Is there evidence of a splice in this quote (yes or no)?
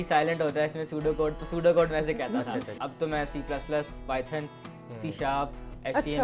yes